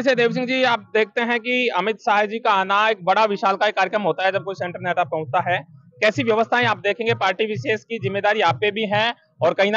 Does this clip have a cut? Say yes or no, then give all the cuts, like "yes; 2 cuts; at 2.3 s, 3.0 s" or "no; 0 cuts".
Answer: no; 0 cuts